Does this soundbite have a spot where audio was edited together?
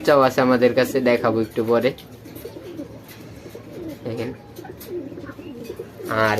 no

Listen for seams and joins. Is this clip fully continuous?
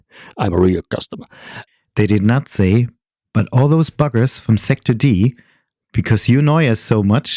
no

